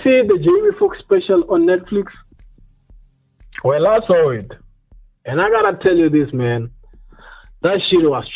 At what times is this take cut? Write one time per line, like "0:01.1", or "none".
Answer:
none